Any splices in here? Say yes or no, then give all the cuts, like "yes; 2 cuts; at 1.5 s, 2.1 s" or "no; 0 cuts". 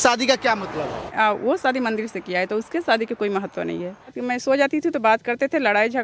yes; 2 cuts; at 1.1 s, 4.2 s